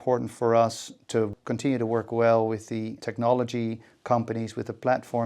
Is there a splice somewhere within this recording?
yes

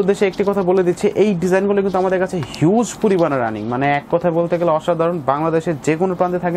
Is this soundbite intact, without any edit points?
yes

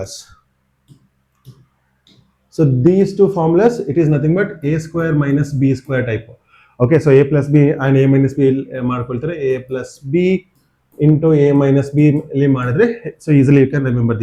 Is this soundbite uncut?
yes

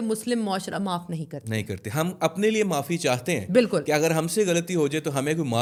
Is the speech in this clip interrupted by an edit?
no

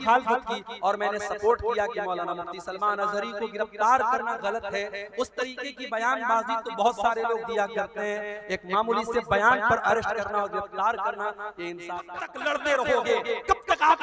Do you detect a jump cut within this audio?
yes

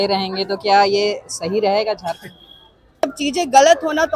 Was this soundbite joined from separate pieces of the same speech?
yes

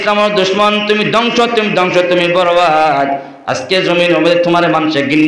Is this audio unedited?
yes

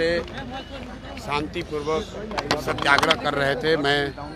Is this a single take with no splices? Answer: yes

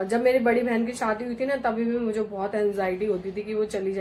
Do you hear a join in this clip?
no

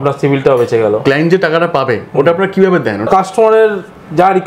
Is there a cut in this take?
yes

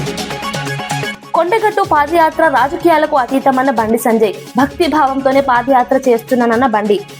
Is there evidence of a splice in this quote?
yes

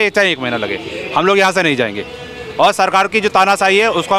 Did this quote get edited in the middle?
no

